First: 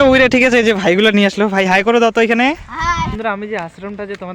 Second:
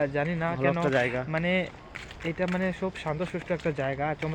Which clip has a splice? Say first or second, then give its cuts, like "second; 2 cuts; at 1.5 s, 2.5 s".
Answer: first; 1 cut; at 3.1 s